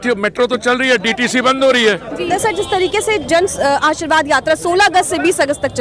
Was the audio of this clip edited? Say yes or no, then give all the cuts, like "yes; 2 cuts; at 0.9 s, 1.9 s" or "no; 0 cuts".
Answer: no; 0 cuts